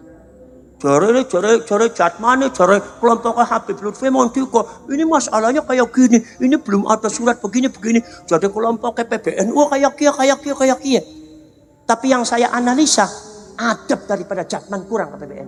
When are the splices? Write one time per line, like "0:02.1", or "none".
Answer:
none